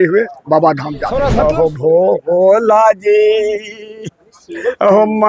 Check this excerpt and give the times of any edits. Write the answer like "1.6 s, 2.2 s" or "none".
1.1 s